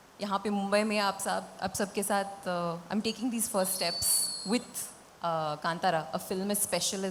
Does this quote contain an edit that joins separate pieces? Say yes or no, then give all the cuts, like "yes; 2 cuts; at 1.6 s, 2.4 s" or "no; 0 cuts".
no; 0 cuts